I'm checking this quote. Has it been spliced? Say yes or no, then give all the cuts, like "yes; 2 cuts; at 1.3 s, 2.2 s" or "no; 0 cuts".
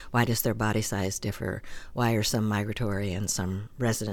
no; 0 cuts